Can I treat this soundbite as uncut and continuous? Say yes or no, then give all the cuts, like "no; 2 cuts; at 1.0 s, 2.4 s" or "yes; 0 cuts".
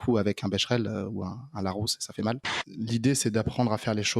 no; 1 cut; at 2.6 s